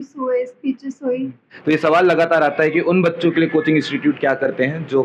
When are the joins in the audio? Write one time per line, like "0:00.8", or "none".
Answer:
0:01.5

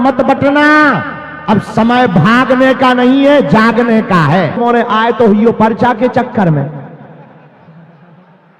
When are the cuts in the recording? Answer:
0:04.6

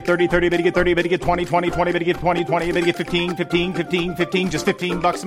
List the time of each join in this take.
none

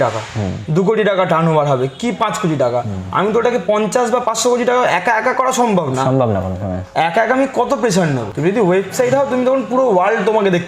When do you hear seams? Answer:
0:08.3

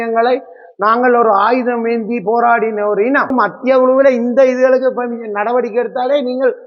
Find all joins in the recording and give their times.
0:03.3

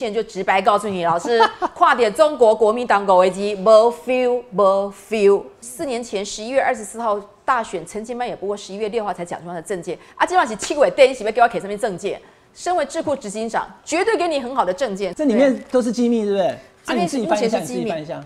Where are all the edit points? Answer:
0:05.6
0:15.1

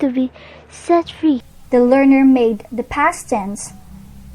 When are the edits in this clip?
none

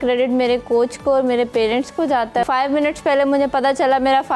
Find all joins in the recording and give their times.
0:02.4

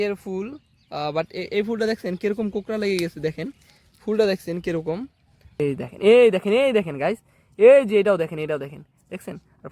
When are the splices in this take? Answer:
0:05.6

